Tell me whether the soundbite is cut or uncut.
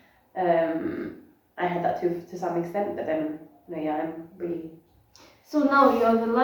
uncut